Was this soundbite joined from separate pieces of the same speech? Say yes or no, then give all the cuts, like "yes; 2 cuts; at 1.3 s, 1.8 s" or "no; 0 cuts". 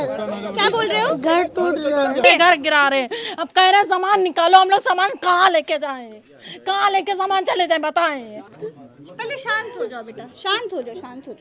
yes; 2 cuts; at 2.2 s, 8.5 s